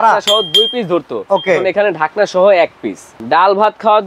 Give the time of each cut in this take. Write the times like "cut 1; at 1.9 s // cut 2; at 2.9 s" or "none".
cut 1; at 3.1 s